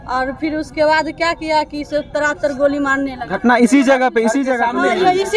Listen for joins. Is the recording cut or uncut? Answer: uncut